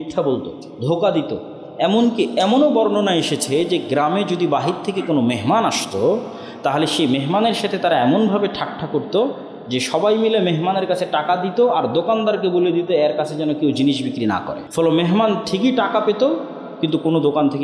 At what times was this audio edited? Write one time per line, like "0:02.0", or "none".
0:14.6